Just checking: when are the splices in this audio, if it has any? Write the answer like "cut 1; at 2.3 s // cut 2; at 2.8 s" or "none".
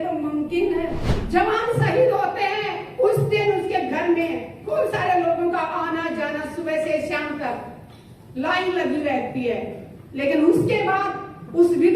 cut 1; at 1.1 s